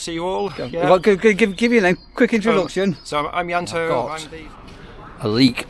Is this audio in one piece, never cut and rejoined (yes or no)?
no